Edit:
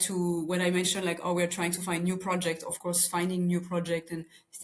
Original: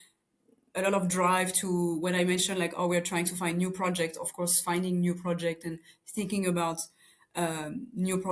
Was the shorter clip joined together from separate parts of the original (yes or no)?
no